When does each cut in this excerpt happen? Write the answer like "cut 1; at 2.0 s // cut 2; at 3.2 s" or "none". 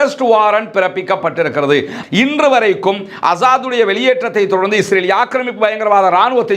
cut 1; at 1.9 s